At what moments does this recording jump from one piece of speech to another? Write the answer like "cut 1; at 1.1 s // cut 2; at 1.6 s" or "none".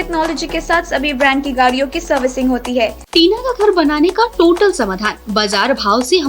cut 1; at 3.1 s